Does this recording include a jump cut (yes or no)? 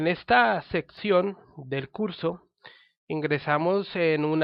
no